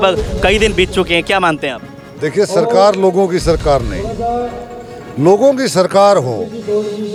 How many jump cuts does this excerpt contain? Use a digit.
0